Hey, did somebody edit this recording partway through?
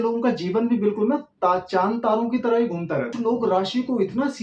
yes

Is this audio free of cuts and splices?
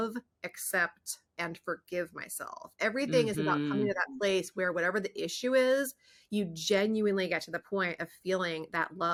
yes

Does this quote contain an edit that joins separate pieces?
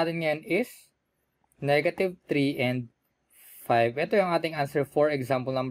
no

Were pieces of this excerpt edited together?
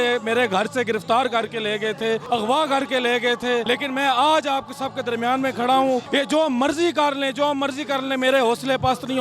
yes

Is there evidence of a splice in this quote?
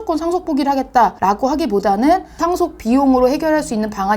yes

